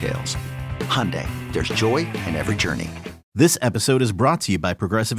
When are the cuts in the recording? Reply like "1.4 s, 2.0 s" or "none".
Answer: 3.2 s